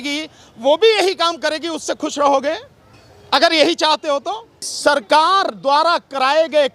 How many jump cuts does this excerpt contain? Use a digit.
1